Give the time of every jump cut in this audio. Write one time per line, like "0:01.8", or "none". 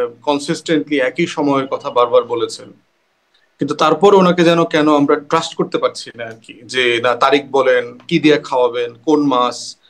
none